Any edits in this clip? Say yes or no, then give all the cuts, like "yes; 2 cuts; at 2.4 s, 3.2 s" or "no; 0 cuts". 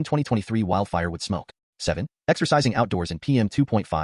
yes; 1 cut; at 1.6 s